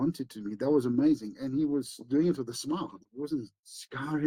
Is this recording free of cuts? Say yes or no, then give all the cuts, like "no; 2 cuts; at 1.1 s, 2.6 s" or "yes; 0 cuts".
no; 1 cut; at 3.1 s